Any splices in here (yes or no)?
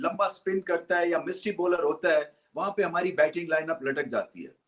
no